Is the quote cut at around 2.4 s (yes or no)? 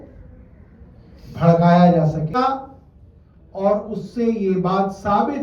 yes